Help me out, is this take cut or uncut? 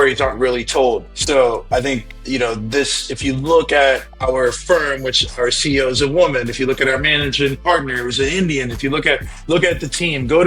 cut